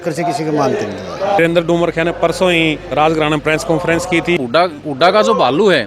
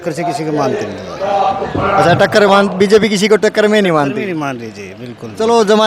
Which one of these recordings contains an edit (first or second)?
first